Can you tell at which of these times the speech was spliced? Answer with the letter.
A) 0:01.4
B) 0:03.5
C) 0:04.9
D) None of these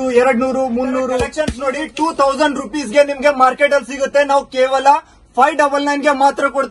A